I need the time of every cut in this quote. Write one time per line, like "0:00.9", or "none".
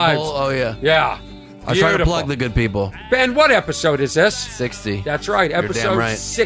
none